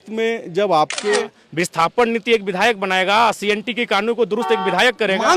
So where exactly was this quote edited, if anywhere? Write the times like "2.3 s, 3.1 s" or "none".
1.2 s